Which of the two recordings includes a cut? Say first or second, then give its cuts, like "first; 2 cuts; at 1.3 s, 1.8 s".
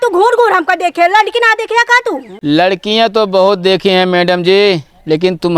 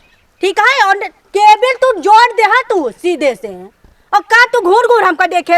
first; 1 cut; at 2.3 s